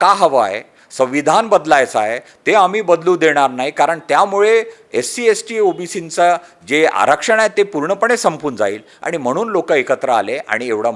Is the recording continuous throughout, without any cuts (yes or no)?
yes